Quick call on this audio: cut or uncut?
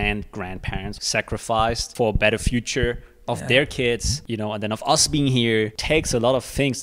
cut